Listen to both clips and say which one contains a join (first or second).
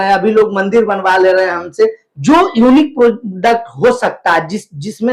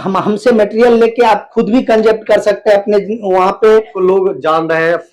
second